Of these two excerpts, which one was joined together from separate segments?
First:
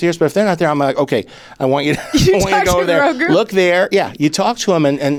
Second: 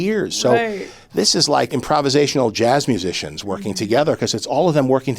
second; 1 cut; at 1.7 s

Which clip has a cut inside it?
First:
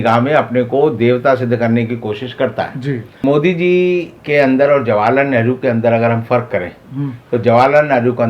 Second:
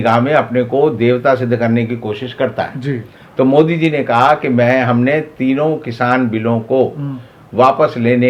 first; 1 cut; at 3.2 s

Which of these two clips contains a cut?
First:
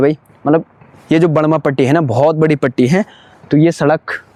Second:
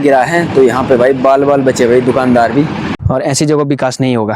second; 1 cut; at 2.9 s

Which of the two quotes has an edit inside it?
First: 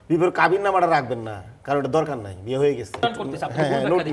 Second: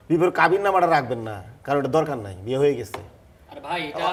first; 1 cut; at 3.0 s

